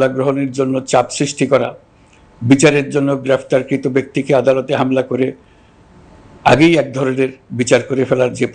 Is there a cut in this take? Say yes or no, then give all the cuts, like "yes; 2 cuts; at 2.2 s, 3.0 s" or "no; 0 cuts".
no; 0 cuts